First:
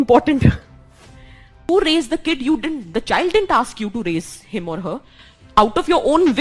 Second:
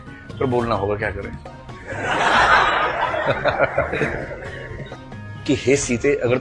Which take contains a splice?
first; 1 cut; at 1.7 s

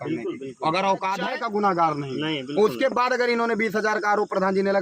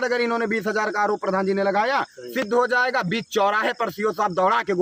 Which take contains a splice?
first; 1 cut; at 1.3 s

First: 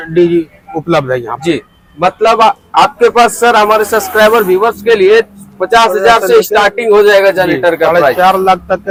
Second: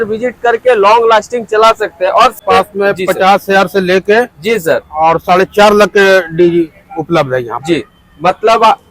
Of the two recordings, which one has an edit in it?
second; 1 cut; at 2.4 s

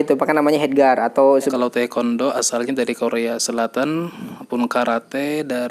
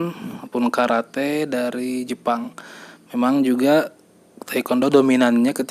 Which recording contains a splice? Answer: first; 1 cut; at 1.5 s

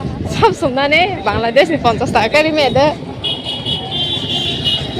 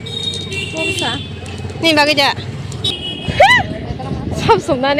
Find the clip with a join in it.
second; 1 cut; at 2.8 s

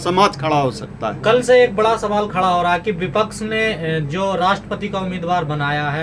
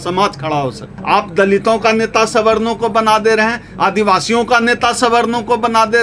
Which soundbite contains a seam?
second; 1 cut; at 0.9 s

